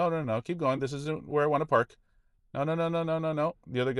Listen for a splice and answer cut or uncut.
uncut